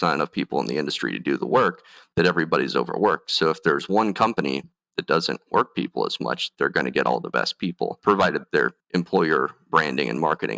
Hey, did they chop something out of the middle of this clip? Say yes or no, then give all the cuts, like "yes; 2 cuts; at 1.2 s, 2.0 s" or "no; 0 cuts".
yes; 1 cut; at 8.8 s